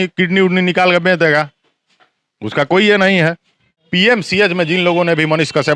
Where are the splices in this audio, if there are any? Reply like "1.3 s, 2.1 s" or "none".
3.8 s